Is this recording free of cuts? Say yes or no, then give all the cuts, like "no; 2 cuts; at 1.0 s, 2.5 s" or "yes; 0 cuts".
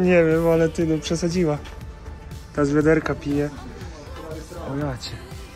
yes; 0 cuts